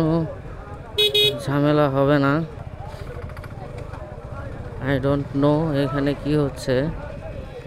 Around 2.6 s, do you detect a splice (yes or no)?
yes